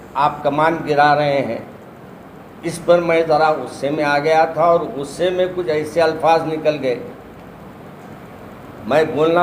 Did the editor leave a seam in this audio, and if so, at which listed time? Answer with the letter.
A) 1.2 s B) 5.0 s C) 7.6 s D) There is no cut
D